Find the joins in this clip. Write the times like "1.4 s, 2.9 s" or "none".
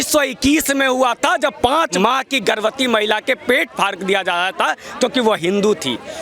1.9 s